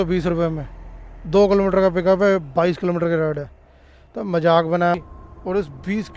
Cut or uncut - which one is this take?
cut